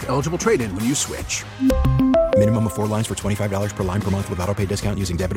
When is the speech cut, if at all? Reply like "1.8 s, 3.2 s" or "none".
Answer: none